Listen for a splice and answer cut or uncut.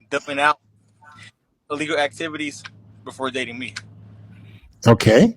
cut